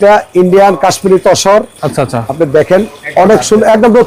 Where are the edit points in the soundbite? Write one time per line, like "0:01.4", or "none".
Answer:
none